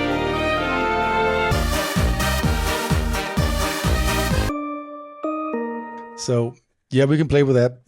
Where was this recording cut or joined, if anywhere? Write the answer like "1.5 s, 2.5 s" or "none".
6.1 s